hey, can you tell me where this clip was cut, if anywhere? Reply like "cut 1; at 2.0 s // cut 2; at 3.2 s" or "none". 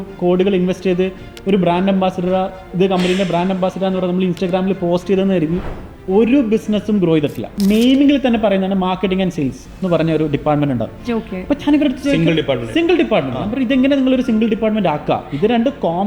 cut 1; at 7.5 s